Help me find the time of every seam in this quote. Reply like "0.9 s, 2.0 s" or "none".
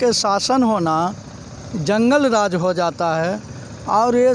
none